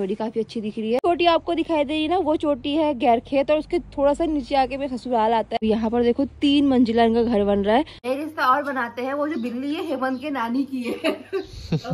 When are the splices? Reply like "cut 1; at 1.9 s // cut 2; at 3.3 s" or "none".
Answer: cut 1; at 1.0 s // cut 2; at 5.6 s // cut 3; at 8.0 s